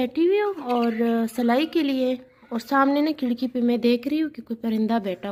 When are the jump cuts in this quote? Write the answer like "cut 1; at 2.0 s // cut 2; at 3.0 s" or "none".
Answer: none

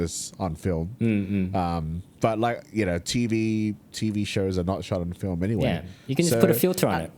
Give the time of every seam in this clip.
none

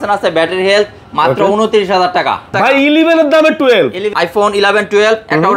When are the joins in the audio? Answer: cut 1; at 2.5 s // cut 2; at 4.1 s

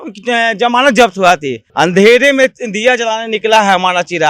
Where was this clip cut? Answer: cut 1; at 1.6 s

